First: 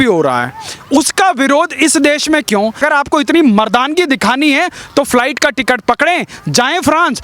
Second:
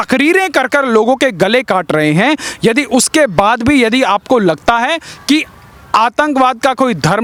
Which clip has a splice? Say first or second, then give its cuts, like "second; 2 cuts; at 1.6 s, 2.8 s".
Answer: first; 1 cut; at 2.8 s